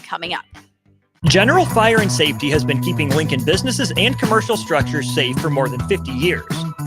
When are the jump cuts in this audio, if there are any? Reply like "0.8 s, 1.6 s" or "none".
1.0 s